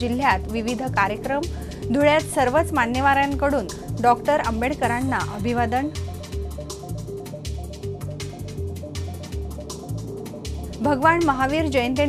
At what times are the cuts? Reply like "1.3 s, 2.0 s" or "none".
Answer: none